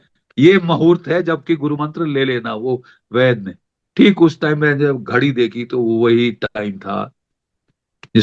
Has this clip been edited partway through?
no; 0 cuts

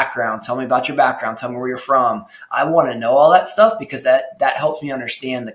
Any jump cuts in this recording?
no; 0 cuts

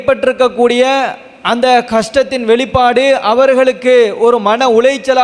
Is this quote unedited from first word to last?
yes; 0 cuts

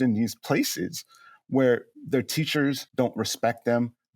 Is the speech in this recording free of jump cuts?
no; 1 cut; at 2.8 s

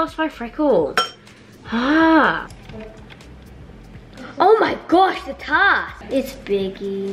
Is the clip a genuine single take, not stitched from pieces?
yes; 0 cuts

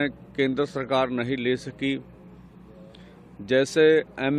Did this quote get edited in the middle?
no; 0 cuts

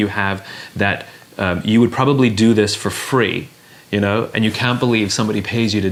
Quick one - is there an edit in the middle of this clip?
no; 0 cuts

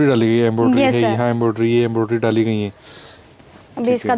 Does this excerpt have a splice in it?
no; 0 cuts

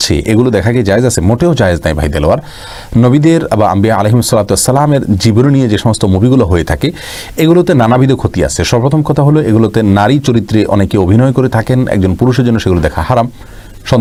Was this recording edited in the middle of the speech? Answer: no; 0 cuts

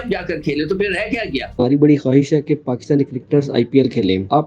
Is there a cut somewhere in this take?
yes; 1 cut; at 1.5 s

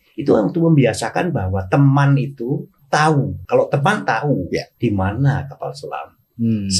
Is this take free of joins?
no; 3 cuts; at 2.7 s, 3.4 s, 4.7 s

